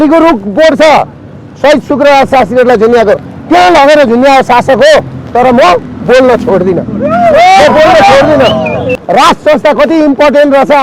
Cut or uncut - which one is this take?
cut